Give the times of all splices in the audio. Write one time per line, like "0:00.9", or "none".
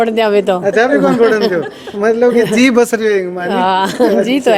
none